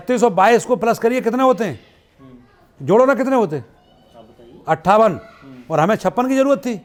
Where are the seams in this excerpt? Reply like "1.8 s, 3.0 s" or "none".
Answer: none